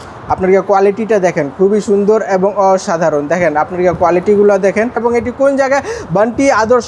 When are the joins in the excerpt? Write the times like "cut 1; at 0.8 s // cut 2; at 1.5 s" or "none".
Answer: cut 1; at 5.0 s